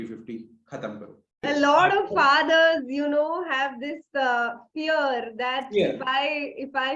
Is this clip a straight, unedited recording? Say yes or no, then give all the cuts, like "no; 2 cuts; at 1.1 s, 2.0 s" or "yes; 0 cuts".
no; 1 cut; at 1.4 s